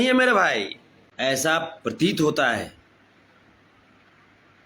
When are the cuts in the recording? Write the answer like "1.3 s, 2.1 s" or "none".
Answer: 1.2 s